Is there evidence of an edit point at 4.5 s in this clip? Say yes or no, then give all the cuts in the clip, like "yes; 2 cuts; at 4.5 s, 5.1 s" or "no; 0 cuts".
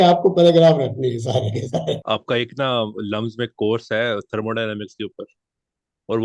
no; 1 cut; at 2.0 s